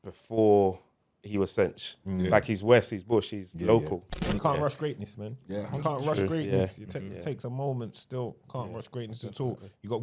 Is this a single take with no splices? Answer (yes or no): no